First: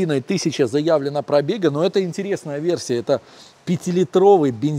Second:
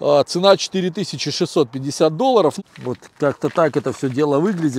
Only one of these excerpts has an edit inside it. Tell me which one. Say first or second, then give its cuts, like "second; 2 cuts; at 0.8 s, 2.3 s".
second; 1 cut; at 2.6 s